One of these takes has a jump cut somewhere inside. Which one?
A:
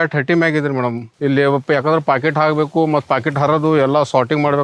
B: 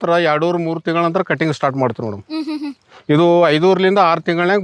A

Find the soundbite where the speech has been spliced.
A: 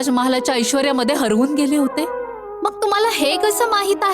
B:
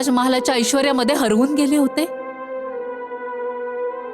A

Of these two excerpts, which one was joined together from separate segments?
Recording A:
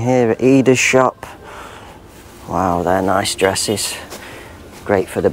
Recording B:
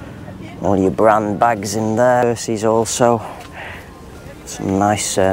B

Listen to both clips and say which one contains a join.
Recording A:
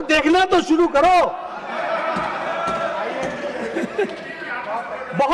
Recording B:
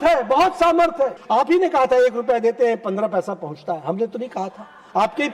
B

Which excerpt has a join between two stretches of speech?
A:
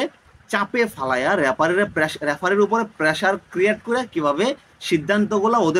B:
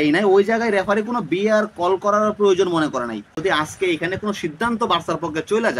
B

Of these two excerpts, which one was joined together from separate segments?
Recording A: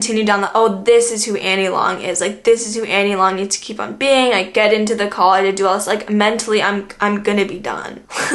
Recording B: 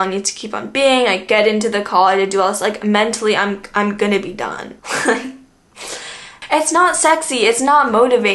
B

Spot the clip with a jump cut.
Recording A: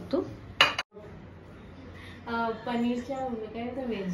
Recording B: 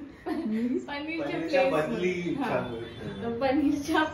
A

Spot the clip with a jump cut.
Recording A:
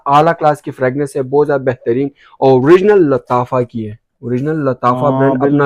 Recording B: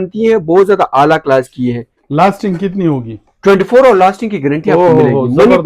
B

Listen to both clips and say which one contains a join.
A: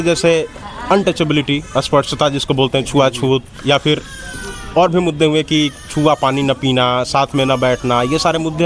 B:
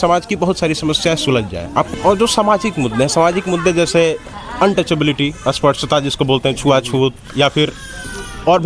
B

